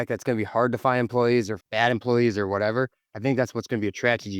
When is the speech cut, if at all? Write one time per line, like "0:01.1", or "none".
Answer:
0:01.6